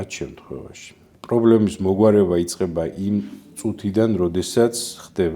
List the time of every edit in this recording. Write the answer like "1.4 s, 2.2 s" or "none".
1.1 s